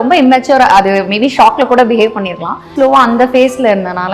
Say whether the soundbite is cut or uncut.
cut